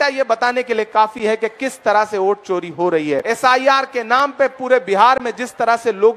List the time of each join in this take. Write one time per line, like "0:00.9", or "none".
0:03.2